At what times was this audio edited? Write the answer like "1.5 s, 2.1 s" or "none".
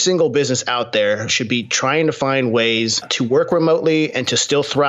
none